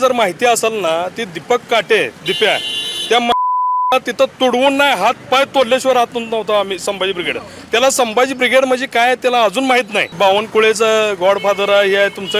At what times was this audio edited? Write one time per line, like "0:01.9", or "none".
0:10.1